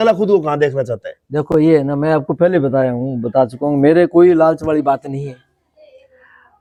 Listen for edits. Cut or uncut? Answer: uncut